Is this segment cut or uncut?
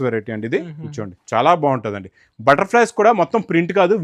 uncut